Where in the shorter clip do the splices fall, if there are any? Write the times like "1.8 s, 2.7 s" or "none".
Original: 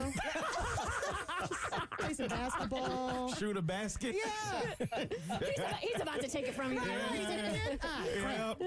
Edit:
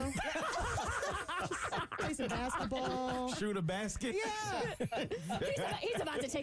none

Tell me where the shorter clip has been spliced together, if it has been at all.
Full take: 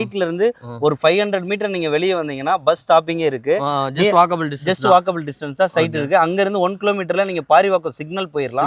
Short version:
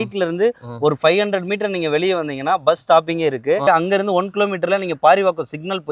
3.6 s

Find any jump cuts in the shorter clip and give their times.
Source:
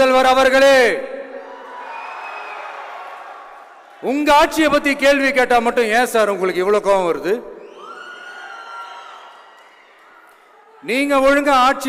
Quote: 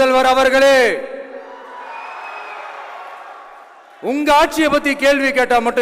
none

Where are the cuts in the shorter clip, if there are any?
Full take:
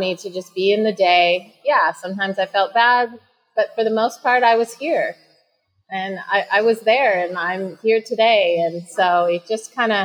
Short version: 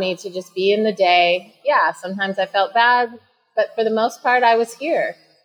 none

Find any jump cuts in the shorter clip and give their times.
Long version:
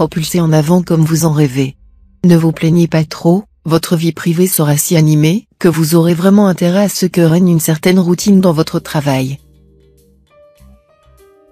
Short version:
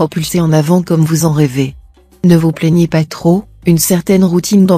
3.7 s

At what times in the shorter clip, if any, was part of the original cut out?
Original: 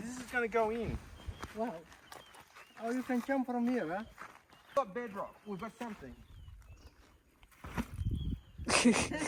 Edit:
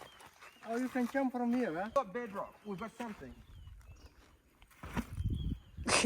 1.9 s

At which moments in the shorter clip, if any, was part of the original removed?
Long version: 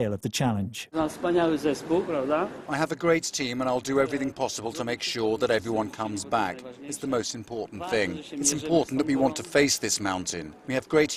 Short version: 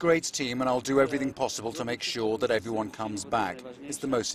none

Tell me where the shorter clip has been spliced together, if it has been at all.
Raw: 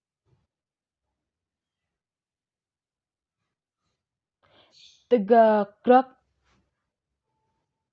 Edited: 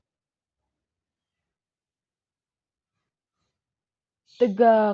4.0 s

